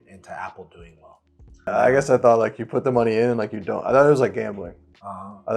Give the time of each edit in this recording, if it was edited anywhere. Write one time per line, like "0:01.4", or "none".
0:01.7